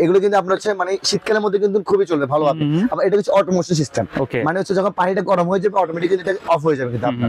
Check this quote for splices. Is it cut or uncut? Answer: uncut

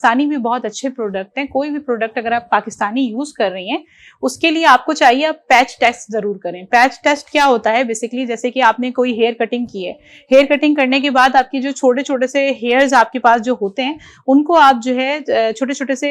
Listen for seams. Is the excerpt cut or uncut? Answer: uncut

